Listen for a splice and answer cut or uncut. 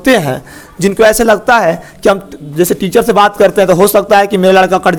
uncut